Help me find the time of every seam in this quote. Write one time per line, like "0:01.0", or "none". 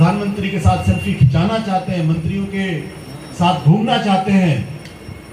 none